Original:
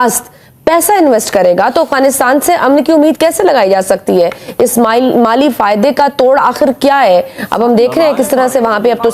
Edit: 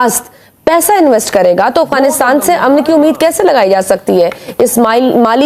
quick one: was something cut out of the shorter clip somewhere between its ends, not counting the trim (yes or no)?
no